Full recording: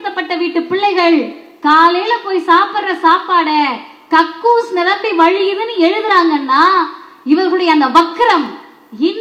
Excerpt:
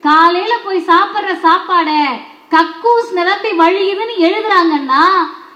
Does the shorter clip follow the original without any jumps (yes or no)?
yes